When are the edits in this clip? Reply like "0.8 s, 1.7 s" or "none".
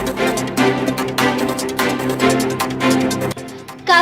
3.0 s